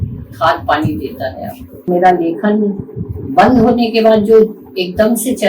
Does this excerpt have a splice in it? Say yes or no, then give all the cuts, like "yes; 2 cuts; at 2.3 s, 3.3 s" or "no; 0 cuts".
yes; 1 cut; at 1.9 s